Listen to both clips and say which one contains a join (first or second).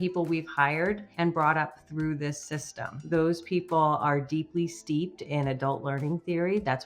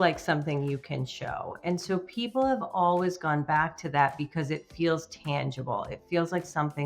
first